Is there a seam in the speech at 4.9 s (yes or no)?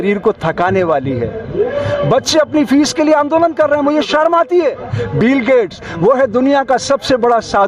yes